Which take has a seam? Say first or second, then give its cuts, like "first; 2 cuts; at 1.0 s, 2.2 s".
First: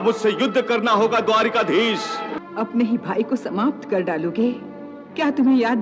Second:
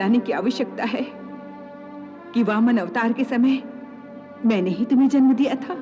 first; 1 cut; at 2.3 s